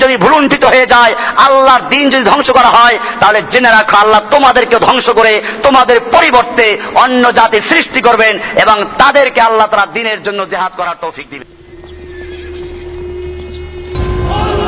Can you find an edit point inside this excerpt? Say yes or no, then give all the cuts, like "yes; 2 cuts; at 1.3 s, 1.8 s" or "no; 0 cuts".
yes; 1 cut; at 11.6 s